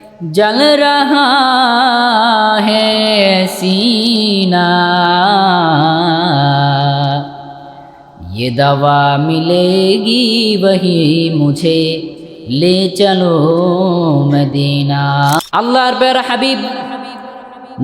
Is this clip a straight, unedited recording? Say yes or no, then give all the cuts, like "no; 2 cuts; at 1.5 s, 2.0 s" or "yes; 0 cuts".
no; 1 cut; at 15.4 s